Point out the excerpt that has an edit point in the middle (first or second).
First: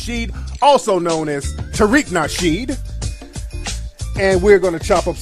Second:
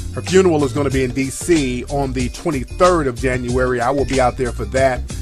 second